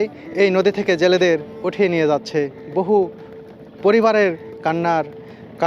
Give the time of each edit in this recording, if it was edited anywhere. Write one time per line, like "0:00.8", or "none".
none